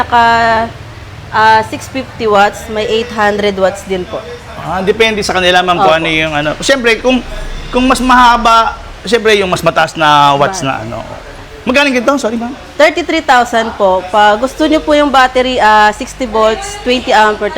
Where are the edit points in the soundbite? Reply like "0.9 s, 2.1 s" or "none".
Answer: none